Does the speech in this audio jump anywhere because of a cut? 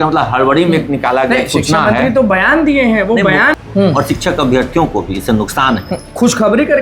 yes; 1 cut; at 3.5 s

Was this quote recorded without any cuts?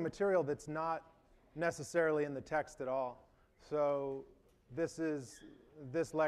no; 1 cut; at 5.0 s

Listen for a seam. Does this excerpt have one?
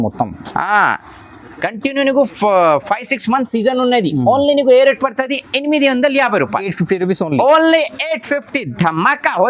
no; 0 cuts

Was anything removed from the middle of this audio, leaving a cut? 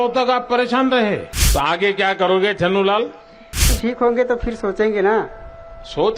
yes; 2 cuts; at 1.4 s, 3.7 s

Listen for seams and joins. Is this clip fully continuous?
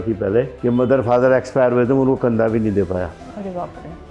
yes; 0 cuts

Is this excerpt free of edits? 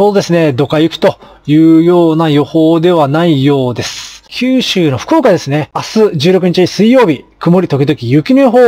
no; 2 cuts; at 4.3 s, 5.8 s

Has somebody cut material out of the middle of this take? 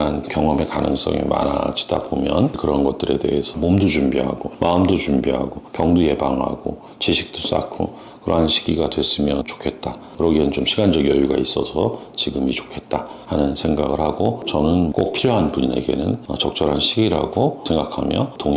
yes; 2 cuts; at 2.6 s, 14.9 s

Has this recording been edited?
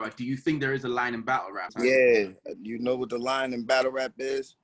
yes; 1 cut; at 1.6 s

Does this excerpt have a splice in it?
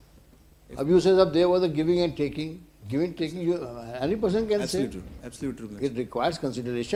no; 0 cuts

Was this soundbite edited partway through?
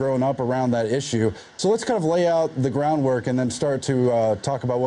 no; 0 cuts

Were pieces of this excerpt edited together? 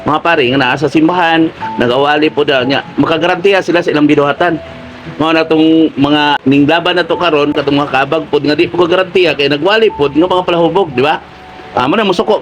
yes; 2 cuts; at 6.4 s, 7.6 s

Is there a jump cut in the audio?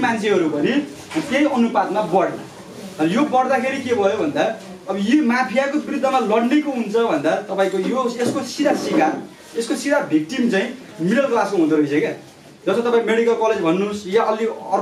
no; 0 cuts

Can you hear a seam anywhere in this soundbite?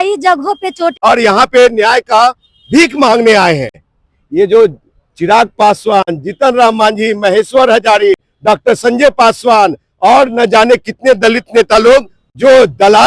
yes; 2 cuts; at 1.0 s, 3.8 s

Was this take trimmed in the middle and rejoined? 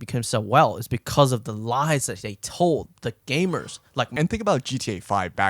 yes; 1 cut; at 4.1 s

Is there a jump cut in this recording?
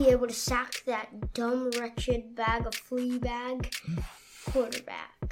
no; 0 cuts

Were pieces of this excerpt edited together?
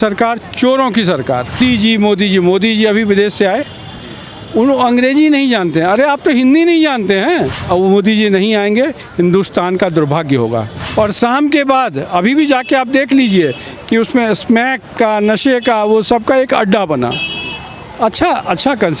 yes; 3 cuts; at 1.6 s, 7.6 s, 10.8 s

